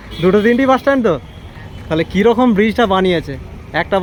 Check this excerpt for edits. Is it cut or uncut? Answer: uncut